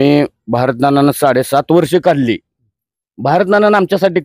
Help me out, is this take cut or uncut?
uncut